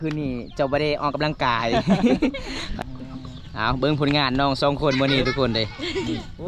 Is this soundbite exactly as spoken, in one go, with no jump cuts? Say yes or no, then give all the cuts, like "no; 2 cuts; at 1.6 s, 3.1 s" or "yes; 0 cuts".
no; 1 cut; at 2.6 s